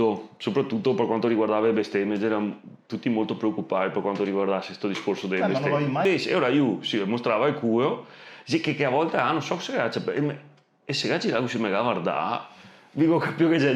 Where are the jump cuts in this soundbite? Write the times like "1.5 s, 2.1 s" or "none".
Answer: 6.0 s